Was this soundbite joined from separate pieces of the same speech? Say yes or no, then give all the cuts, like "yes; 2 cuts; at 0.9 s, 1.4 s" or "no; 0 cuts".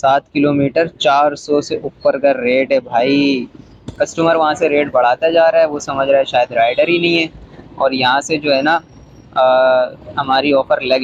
no; 0 cuts